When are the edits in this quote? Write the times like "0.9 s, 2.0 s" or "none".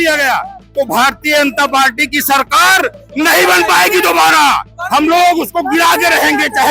none